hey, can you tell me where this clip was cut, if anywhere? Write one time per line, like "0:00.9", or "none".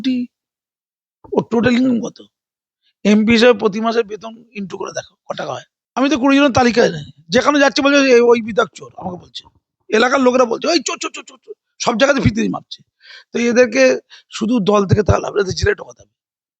0:05.8